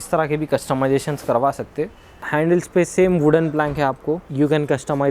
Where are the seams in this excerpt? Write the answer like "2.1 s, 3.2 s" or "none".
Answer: 2.2 s, 4.3 s

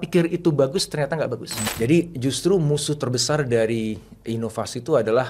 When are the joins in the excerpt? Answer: 1.6 s

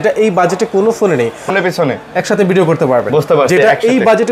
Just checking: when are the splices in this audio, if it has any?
1.5 s

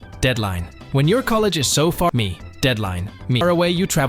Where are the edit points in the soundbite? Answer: none

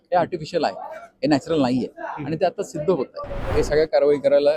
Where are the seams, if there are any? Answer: 3.4 s

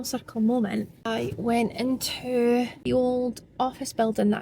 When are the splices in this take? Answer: 1.0 s, 2.8 s

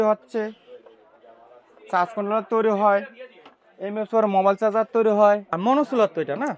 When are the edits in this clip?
5.5 s

